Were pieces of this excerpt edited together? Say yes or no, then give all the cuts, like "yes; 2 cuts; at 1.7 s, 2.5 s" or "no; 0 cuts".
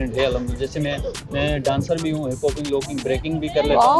yes; 1 cut; at 1.2 s